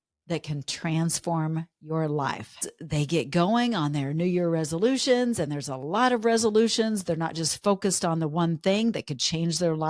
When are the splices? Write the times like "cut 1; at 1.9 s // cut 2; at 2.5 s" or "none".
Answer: cut 1; at 2.6 s

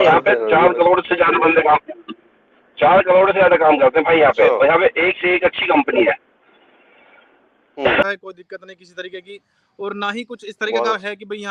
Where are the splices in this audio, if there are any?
cut 1; at 8.1 s

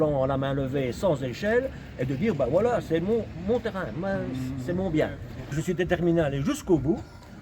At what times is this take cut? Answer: cut 1; at 5.6 s

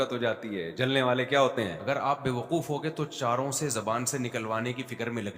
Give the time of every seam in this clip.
cut 1; at 1.8 s

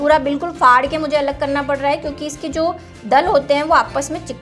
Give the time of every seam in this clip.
none

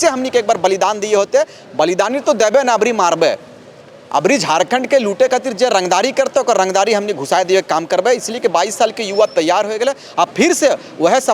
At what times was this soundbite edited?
none

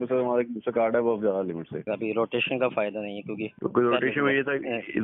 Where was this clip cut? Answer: cut 1; at 1.8 s // cut 2; at 3.5 s

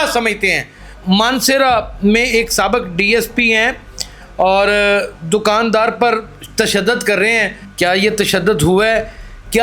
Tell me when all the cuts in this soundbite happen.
cut 1; at 0.9 s // cut 2; at 7.6 s

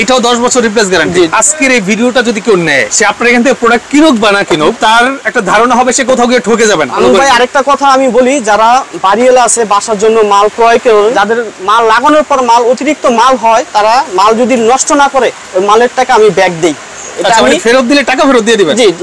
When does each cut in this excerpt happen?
cut 1; at 1.3 s // cut 2; at 2.9 s // cut 3; at 4.8 s // cut 4; at 7.0 s // cut 5; at 11.1 s

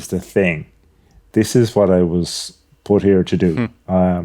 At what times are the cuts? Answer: cut 1; at 1.2 s

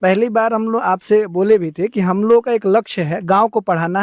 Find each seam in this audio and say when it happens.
none

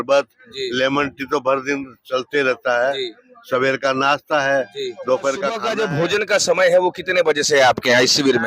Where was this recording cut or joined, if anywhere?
cut 1; at 5.7 s

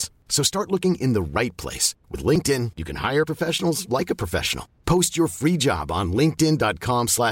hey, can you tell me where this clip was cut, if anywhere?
none

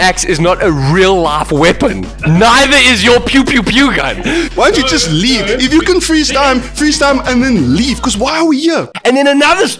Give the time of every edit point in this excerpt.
cut 1; at 4.4 s // cut 2; at 8.9 s

